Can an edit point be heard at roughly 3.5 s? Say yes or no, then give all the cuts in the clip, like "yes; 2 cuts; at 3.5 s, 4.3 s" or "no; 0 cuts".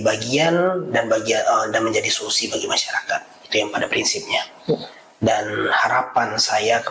no; 0 cuts